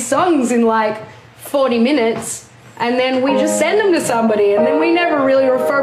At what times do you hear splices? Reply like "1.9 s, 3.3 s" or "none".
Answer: none